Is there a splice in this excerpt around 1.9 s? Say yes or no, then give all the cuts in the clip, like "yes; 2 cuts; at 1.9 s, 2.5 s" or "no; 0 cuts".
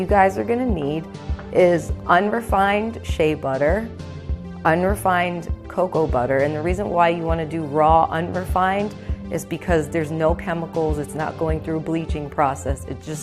yes; 1 cut; at 1.9 s